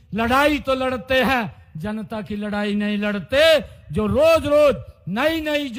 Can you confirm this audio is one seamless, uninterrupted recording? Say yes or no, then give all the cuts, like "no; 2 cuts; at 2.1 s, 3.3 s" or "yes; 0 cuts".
yes; 0 cuts